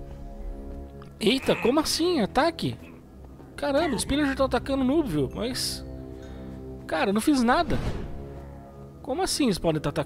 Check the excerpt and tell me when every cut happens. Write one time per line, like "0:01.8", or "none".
0:01.1